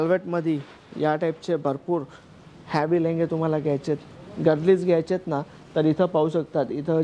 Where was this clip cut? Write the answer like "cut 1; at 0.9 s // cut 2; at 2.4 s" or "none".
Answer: none